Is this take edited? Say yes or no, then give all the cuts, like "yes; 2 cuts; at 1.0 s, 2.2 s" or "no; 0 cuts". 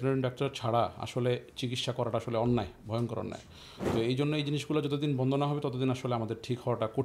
no; 0 cuts